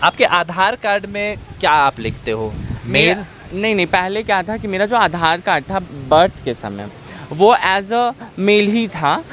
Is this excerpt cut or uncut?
uncut